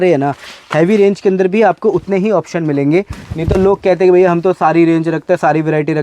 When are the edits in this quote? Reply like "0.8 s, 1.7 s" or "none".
none